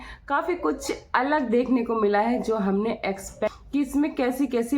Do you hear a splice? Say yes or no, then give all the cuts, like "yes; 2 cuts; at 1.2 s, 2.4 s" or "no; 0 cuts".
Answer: yes; 1 cut; at 3.6 s